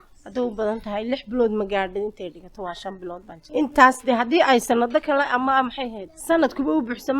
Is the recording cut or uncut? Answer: cut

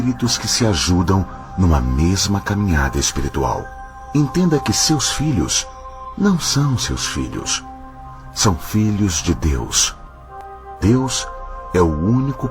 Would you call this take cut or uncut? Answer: cut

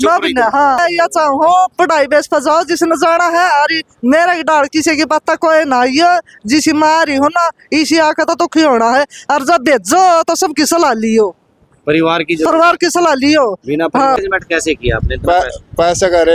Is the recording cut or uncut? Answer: cut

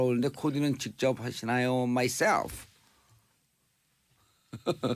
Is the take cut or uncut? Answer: cut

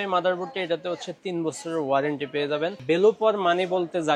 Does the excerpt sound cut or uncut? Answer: cut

